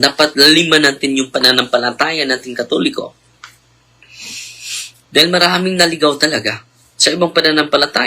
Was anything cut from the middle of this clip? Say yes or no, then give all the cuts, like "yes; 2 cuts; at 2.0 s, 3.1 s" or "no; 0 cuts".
no; 0 cuts